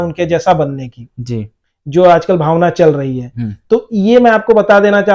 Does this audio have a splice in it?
no; 0 cuts

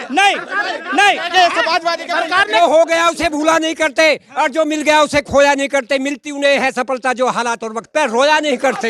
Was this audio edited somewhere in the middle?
yes; 1 cut; at 2.6 s

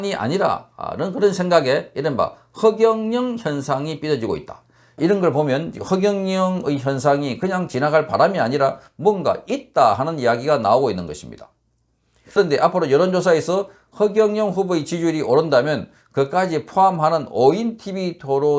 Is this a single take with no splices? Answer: no; 2 cuts; at 5.0 s, 12.4 s

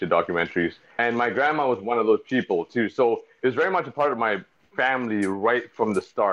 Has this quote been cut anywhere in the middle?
yes; 1 cut; at 1.0 s

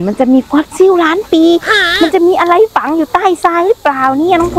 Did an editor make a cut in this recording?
no; 0 cuts

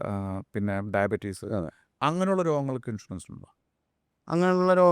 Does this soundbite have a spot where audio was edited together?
no; 0 cuts

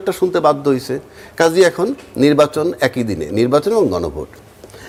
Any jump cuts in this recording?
no; 0 cuts

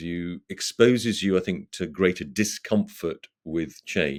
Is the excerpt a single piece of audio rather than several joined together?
yes; 0 cuts

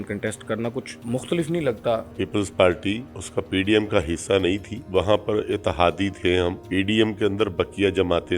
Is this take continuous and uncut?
no; 5 cuts; at 0.9 s, 2.2 s, 3.1 s, 4.7 s, 6.6 s

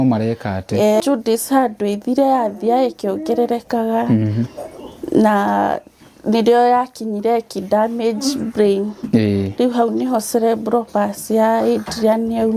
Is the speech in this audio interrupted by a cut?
yes; 1 cut; at 1.0 s

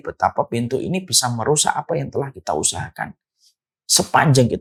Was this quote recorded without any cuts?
yes; 0 cuts

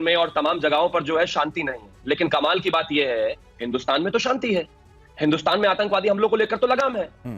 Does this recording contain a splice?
no; 0 cuts

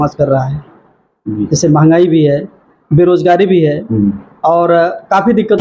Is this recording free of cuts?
yes; 0 cuts

